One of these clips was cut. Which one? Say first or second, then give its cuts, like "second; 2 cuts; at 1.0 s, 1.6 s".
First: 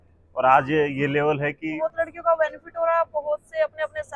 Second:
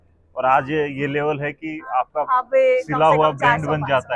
first; 1 cut; at 1.8 s